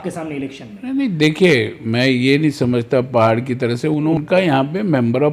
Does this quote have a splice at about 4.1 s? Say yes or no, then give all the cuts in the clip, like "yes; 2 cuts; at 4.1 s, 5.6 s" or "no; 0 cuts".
yes; 1 cut; at 4.1 s